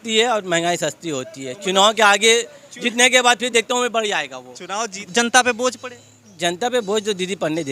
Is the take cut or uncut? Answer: cut